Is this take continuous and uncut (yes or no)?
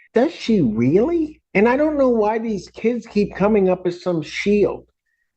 no